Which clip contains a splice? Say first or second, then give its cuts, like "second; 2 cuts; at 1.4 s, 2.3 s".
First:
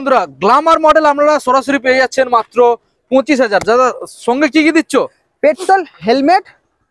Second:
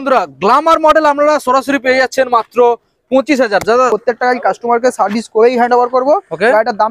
second; 1 cut; at 3.9 s